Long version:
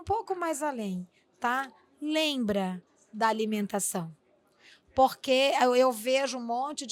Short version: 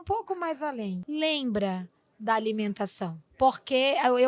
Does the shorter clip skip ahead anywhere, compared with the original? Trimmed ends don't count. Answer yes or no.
yes